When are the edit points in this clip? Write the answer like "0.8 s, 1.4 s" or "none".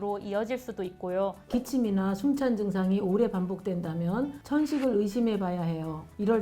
1.4 s